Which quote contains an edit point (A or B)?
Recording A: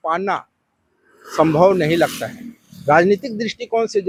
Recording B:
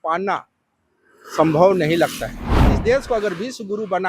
B